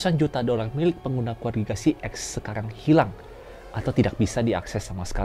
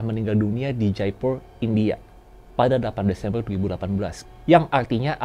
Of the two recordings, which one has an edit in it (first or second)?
second